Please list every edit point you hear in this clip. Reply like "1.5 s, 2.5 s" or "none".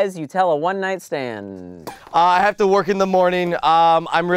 none